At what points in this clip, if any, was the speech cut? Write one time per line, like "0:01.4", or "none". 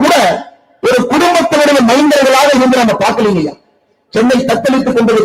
none